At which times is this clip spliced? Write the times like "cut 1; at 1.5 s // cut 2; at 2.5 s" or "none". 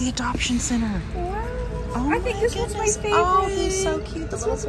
none